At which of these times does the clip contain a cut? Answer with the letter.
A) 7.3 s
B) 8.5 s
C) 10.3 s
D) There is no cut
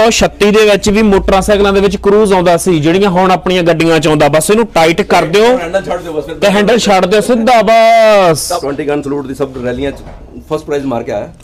B